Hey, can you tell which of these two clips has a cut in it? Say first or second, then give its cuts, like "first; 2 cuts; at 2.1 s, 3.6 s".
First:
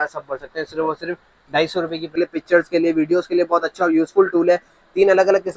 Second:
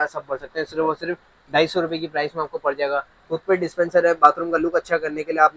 first; 1 cut; at 2.1 s